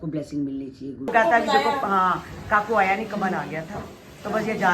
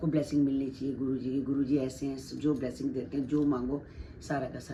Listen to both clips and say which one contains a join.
first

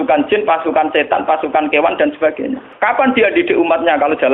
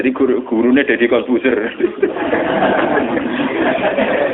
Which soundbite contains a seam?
first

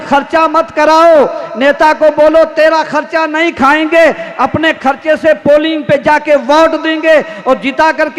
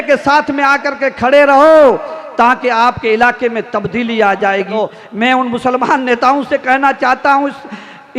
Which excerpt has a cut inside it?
second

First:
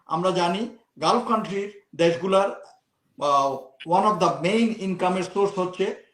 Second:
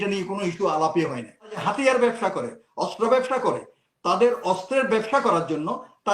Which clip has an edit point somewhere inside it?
second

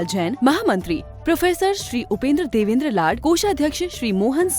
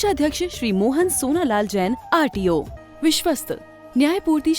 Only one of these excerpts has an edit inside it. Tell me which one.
second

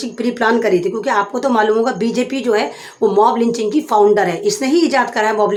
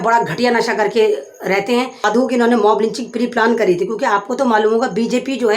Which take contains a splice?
second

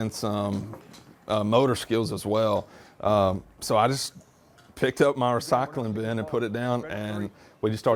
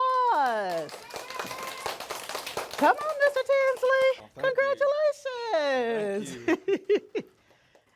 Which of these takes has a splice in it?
second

